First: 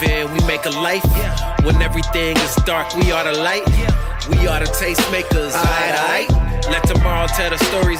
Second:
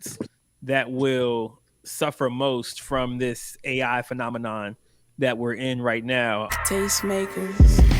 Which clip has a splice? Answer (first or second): second